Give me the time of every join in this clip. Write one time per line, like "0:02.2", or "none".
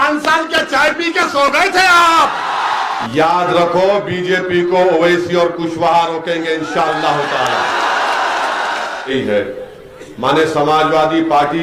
0:03.0
0:09.1